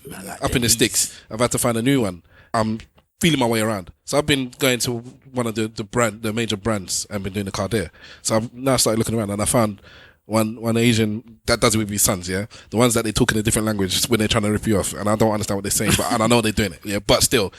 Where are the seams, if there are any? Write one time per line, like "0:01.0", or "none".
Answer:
0:02.4
0:08.0
0:11.4